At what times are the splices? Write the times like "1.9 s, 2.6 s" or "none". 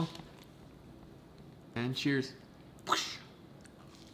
1.7 s